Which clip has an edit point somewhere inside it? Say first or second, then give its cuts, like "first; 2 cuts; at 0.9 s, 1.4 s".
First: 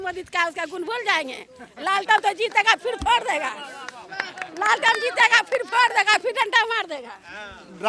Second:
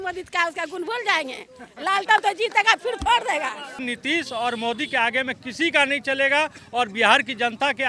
second; 1 cut; at 3.8 s